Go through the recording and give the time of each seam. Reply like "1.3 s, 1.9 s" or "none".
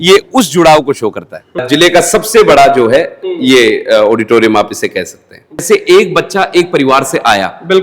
1.5 s, 5.6 s